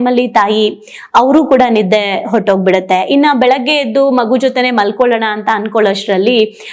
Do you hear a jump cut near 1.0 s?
no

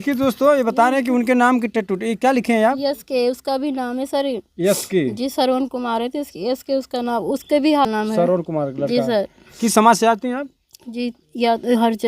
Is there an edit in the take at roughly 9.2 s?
no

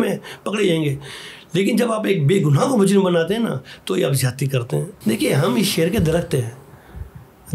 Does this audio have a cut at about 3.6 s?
no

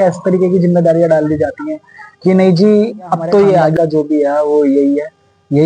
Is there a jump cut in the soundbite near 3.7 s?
yes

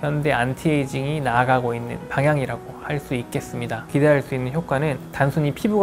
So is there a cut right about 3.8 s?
yes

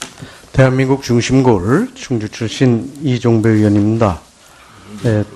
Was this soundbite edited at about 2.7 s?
no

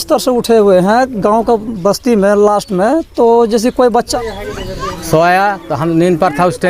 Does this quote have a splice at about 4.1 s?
yes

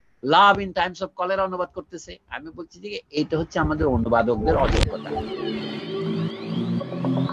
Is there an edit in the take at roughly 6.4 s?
no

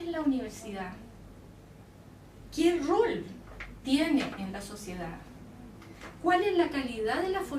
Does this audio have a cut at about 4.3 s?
yes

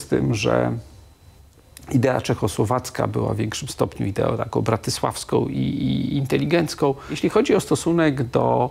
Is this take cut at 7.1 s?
yes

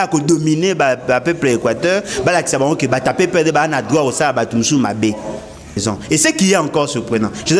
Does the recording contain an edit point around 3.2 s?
no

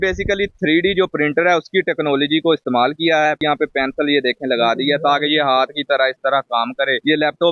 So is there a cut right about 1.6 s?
no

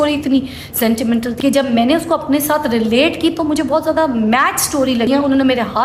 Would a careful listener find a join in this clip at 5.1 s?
yes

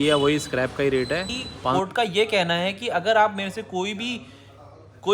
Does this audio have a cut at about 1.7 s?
yes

